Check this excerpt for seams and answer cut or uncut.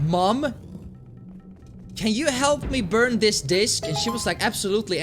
cut